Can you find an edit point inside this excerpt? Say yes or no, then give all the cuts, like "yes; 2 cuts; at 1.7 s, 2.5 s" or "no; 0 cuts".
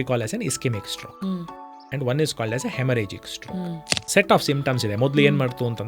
yes; 1 cut; at 4.0 s